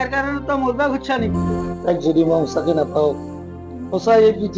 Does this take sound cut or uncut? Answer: cut